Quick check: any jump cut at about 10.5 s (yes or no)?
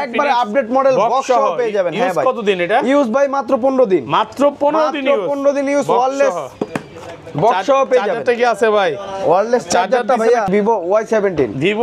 yes